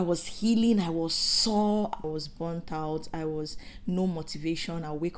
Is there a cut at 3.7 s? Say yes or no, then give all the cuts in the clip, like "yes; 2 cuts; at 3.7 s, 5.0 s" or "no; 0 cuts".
no; 1 cut; at 2.0 s